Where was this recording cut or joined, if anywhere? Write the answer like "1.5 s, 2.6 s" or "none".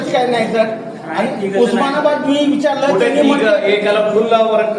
none